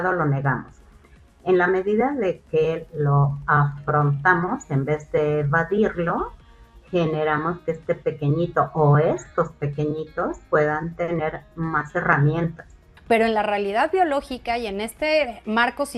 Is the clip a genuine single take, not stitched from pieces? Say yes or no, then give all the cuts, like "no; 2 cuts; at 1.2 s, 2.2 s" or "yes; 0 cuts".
no; 1 cut; at 12.9 s